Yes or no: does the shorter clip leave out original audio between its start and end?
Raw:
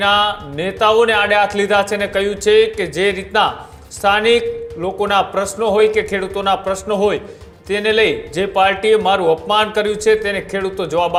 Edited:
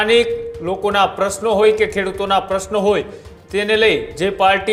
no